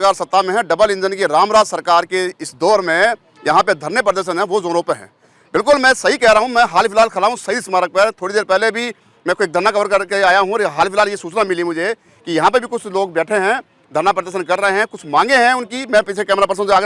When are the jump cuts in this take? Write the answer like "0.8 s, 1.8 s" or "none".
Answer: none